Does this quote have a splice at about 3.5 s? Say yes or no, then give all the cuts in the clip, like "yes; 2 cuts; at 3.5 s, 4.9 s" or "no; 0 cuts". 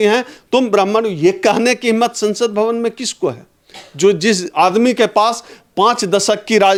no; 0 cuts